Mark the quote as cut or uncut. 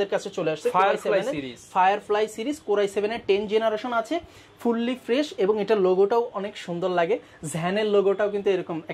uncut